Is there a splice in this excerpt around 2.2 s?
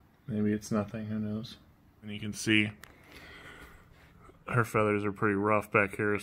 yes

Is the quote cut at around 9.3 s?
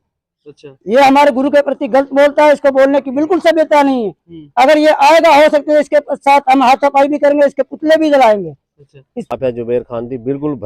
yes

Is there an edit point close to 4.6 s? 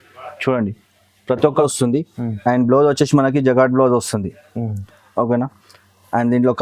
no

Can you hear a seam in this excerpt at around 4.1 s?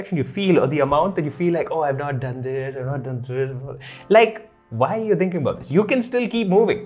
no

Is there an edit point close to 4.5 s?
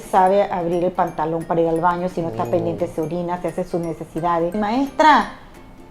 yes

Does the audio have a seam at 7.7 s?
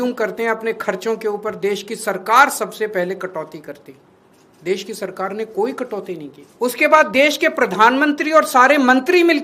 no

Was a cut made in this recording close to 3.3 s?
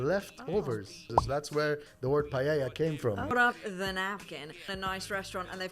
yes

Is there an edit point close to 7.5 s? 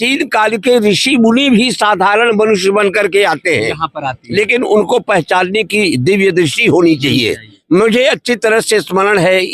yes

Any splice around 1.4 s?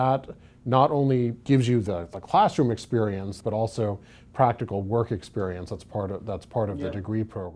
yes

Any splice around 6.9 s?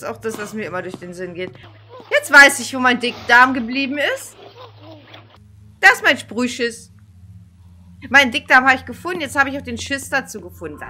no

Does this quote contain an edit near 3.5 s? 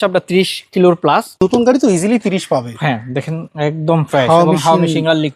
no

